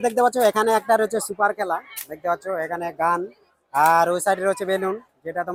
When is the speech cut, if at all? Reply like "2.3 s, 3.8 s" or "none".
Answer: none